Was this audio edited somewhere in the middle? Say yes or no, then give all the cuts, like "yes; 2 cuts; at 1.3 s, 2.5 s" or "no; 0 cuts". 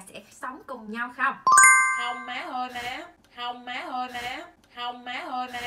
no; 0 cuts